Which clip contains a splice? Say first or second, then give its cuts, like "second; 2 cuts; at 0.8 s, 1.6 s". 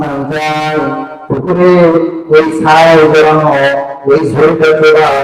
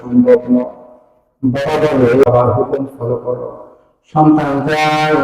second; 1 cut; at 2.2 s